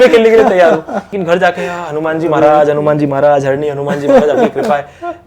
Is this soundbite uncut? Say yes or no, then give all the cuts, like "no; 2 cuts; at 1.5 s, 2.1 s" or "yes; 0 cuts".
no; 1 cut; at 1.2 s